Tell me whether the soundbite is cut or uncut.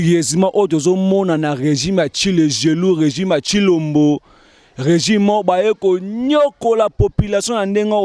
uncut